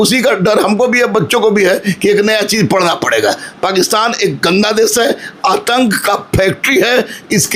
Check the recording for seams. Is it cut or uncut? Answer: uncut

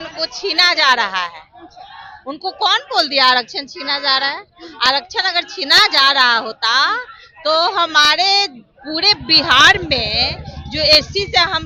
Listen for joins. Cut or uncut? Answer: uncut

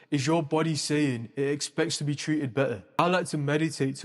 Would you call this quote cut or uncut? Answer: cut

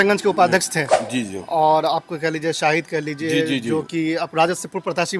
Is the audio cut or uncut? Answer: uncut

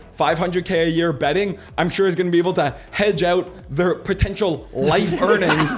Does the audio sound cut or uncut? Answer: uncut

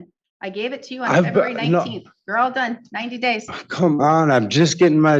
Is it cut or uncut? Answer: uncut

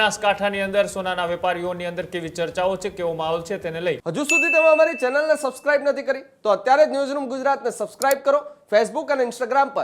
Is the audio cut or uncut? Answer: cut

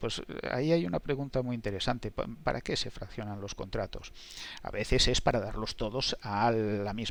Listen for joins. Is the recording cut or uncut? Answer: uncut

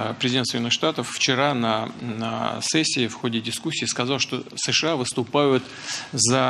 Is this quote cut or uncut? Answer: cut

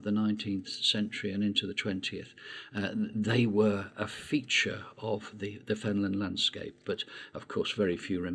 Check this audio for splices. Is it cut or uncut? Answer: uncut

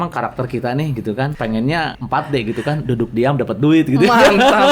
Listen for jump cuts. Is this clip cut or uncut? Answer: cut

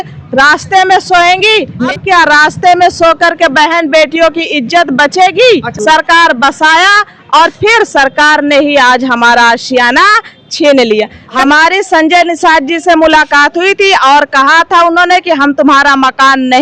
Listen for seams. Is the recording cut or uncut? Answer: cut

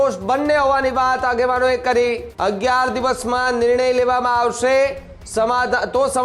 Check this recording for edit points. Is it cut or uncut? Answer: cut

